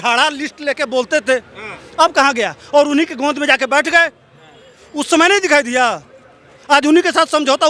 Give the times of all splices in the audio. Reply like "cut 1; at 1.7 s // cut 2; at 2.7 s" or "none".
none